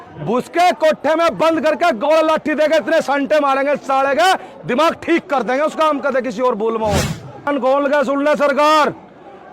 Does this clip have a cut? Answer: yes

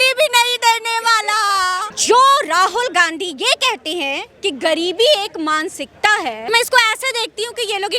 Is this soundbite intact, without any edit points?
no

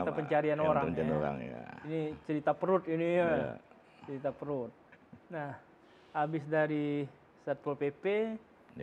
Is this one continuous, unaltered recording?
yes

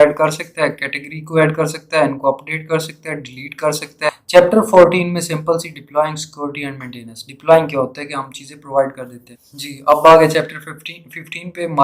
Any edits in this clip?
yes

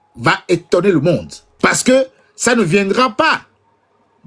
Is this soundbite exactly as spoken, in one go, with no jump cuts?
no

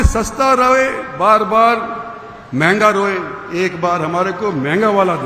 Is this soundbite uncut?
yes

